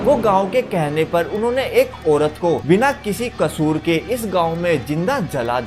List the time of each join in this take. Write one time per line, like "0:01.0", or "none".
0:02.6